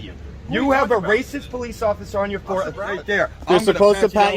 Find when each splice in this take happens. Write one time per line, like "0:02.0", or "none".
0:03.0